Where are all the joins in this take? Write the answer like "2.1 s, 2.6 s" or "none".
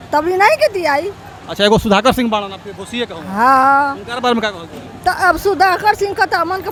none

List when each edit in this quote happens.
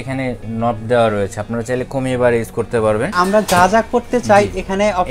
3.1 s

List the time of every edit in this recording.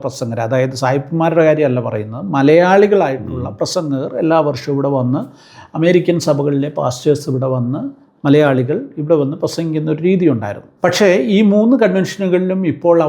10.6 s

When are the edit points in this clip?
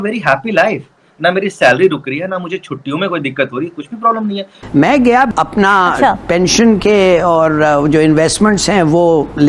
4.6 s

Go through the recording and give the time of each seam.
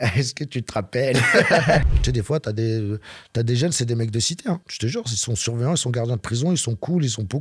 1.8 s

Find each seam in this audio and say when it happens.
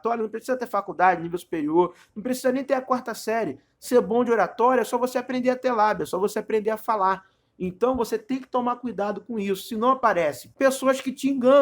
10.4 s

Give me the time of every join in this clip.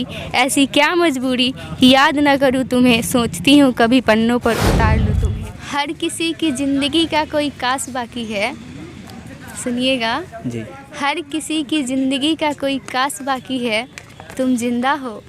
5.0 s

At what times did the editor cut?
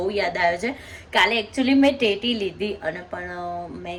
none

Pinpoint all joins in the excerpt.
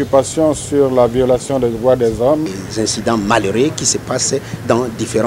2.5 s

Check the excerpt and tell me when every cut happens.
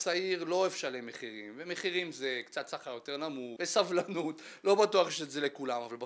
3.5 s

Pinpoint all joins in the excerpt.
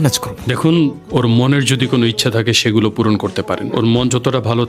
1.0 s

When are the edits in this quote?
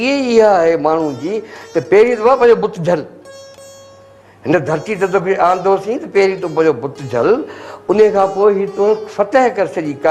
none

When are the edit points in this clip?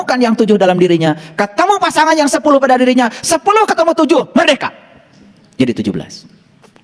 none

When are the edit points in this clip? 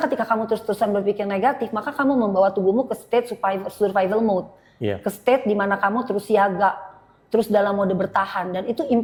none

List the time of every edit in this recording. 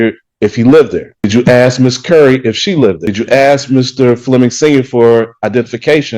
1.2 s, 3.1 s

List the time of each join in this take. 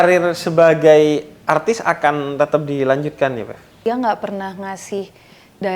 3.8 s

